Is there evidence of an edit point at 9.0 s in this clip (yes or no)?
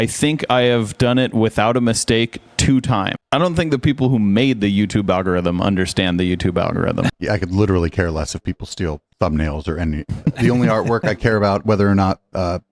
no